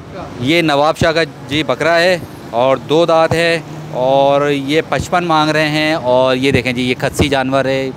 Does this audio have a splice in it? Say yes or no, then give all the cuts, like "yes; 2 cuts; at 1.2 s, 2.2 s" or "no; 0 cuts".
no; 0 cuts